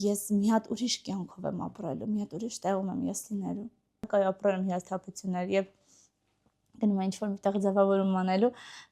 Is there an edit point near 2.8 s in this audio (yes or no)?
no